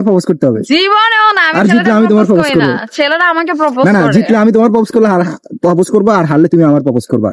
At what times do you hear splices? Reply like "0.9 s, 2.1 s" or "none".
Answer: none